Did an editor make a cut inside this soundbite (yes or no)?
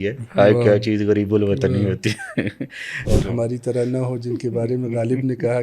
yes